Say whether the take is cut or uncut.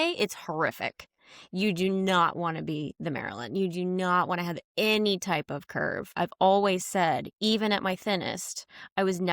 cut